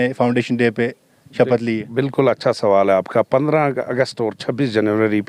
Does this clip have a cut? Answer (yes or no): no